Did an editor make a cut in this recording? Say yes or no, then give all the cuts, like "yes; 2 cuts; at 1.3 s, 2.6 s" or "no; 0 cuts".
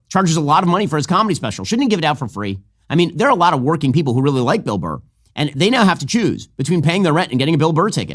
no; 0 cuts